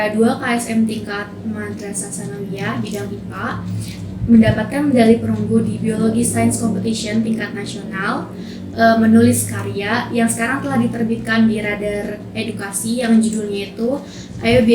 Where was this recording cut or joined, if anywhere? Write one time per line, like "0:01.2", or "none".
none